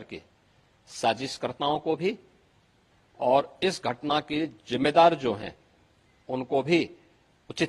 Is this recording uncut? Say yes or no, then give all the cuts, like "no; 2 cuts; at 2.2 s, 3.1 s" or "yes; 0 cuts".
yes; 0 cuts